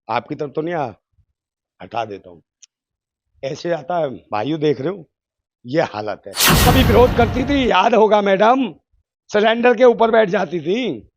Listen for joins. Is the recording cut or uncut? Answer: cut